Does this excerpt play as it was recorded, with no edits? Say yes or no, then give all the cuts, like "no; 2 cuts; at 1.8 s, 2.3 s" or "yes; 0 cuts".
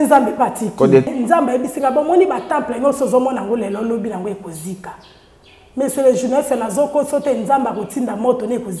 no; 1 cut; at 1.1 s